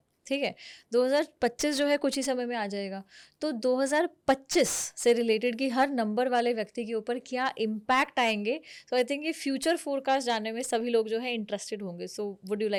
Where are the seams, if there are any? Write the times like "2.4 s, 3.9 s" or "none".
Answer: none